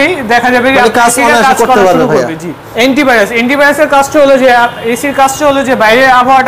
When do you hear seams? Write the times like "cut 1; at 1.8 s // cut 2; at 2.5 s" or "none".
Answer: cut 1; at 2.6 s